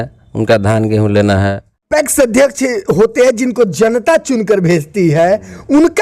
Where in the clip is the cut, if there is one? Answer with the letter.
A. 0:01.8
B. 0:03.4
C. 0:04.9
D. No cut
A